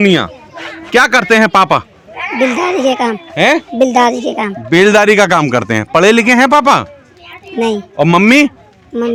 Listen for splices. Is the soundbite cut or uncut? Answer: uncut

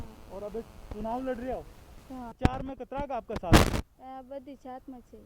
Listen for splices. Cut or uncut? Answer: cut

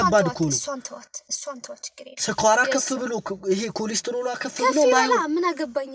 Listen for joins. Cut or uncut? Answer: uncut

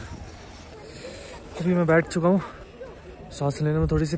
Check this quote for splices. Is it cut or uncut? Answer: uncut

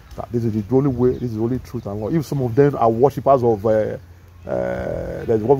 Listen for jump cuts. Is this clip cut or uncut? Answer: uncut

